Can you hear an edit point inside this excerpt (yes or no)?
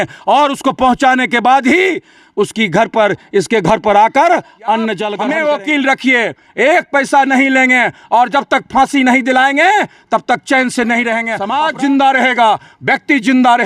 yes